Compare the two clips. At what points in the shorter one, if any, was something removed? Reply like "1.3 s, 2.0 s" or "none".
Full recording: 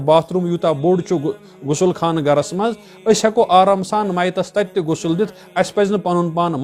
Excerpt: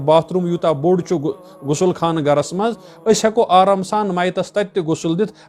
none